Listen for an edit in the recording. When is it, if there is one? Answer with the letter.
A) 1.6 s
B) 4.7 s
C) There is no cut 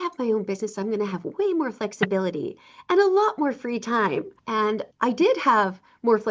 B